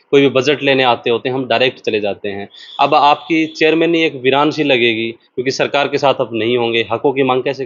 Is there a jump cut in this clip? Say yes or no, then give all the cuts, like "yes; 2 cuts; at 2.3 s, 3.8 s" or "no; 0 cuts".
no; 0 cuts